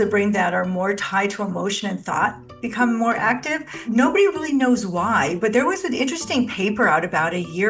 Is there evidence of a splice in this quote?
yes; 1 cut; at 3.6 s

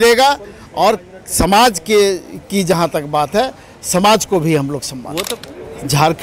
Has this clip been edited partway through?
yes; 1 cut; at 5.3 s

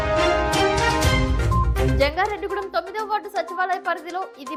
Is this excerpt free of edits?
yes; 0 cuts

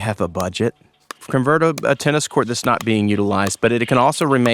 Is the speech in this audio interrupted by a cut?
yes; 1 cut; at 1.1 s

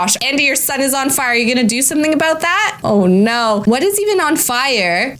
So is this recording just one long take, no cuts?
yes; 0 cuts

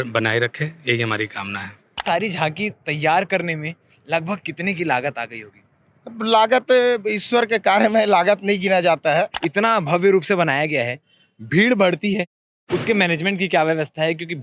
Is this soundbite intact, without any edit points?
no; 2 cuts; at 2.0 s, 9.4 s

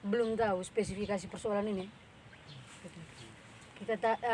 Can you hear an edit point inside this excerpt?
no; 0 cuts

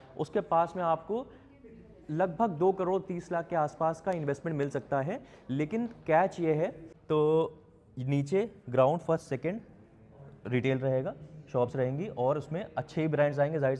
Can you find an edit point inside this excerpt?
yes; 1 cut; at 6.9 s

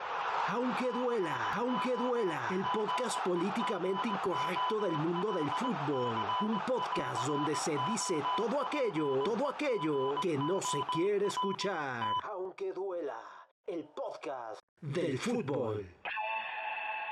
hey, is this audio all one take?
yes; 0 cuts

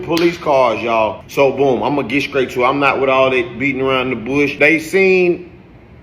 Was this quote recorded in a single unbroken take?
no; 1 cut; at 0.9 s

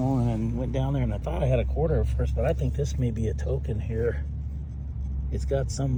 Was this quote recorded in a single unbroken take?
yes; 0 cuts

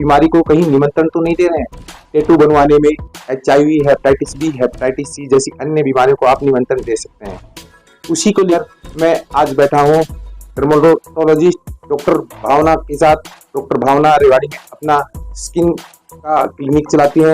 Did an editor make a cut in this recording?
yes; 1 cut; at 8.6 s

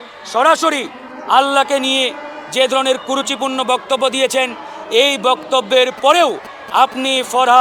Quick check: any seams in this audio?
no; 0 cuts

